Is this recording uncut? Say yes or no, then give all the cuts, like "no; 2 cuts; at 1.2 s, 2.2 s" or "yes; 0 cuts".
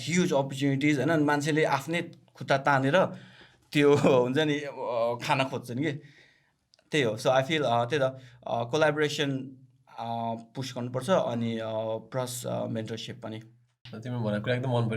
no; 1 cut; at 13.9 s